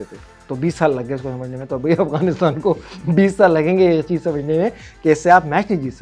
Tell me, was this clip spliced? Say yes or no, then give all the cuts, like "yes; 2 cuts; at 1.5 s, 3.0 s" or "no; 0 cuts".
no; 0 cuts